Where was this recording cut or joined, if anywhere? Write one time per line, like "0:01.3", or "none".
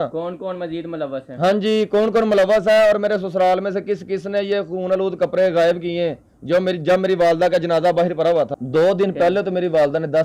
0:08.5